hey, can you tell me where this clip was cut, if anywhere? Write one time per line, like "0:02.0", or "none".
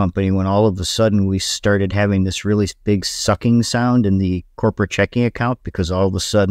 none